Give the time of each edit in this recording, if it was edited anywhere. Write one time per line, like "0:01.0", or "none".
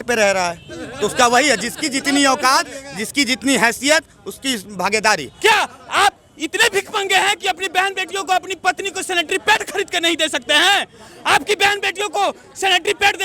0:05.3